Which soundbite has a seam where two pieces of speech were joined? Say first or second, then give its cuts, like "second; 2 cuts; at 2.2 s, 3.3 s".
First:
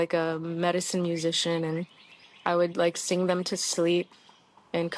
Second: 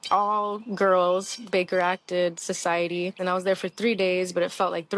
second; 1 cut; at 3.2 s